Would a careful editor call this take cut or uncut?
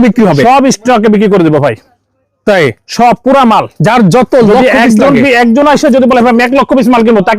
uncut